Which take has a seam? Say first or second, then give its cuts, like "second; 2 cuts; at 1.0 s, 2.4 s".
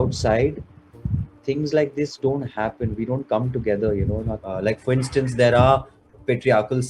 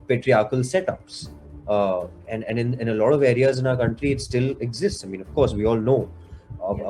first; 1 cut; at 4.3 s